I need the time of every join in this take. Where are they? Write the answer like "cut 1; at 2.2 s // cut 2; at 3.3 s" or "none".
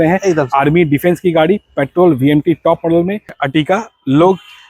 cut 1; at 3.4 s